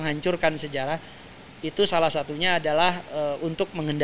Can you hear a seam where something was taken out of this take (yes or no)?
no